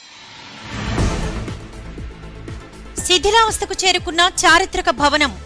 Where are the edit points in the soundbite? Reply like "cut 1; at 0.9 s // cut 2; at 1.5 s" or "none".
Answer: cut 1; at 1.2 s // cut 2; at 3.1 s